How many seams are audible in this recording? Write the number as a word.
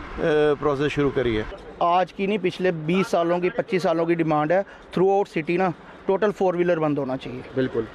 one